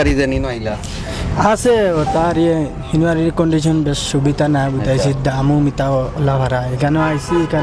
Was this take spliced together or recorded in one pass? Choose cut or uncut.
uncut